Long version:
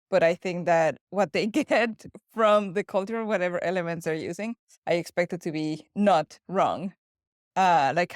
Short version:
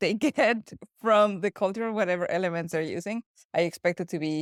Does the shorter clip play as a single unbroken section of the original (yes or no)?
yes